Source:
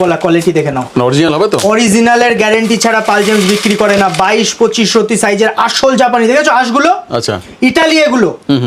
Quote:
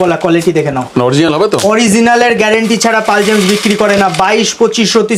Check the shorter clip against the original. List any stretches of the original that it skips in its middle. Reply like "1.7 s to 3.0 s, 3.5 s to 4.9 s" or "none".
none